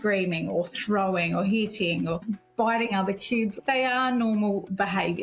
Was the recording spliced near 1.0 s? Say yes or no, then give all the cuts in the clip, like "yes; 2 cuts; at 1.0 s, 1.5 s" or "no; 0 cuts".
no; 2 cuts; at 2.2 s, 3.6 s